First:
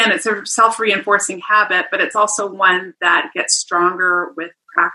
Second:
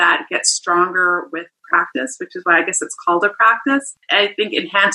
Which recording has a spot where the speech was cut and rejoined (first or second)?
second